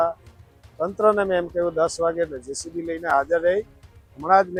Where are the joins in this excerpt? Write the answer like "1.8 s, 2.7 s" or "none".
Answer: none